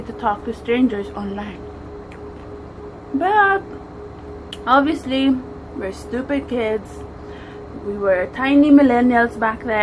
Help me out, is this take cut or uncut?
uncut